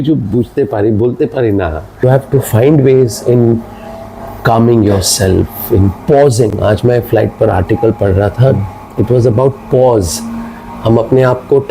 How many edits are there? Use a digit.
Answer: 1